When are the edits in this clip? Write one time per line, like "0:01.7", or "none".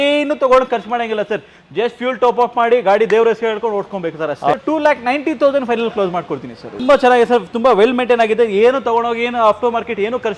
0:04.6
0:06.8